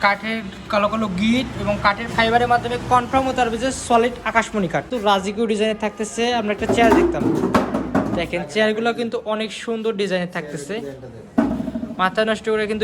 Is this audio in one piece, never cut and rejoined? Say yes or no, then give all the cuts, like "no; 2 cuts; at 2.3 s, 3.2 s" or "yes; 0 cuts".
no; 1 cut; at 4.9 s